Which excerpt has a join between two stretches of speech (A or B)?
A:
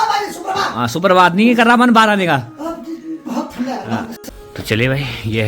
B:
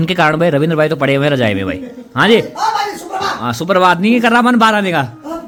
A